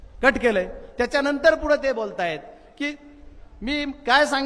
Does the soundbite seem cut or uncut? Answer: uncut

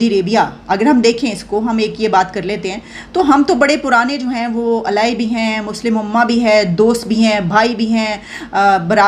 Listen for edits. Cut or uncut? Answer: uncut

